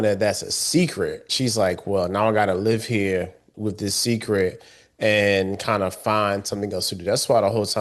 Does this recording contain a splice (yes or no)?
yes